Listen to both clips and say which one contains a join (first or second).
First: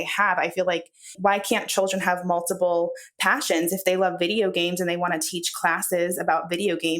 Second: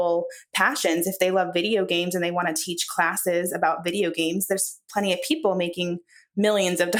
first